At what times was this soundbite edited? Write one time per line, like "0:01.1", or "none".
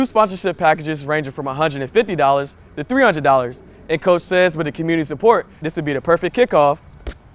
none